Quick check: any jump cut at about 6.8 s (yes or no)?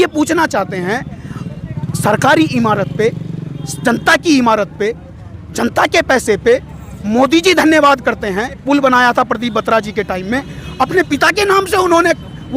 no